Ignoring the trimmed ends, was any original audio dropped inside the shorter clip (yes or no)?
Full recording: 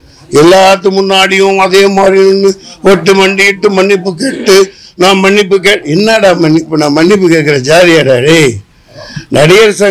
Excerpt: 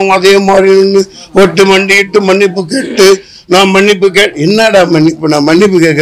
no